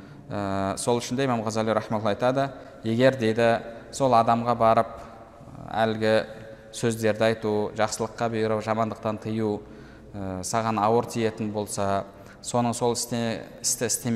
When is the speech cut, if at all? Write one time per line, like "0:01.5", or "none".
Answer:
none